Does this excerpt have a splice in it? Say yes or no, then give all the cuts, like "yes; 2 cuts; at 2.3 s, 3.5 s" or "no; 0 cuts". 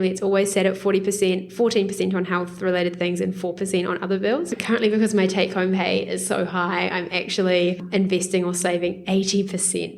yes; 2 cuts; at 4.5 s, 7.8 s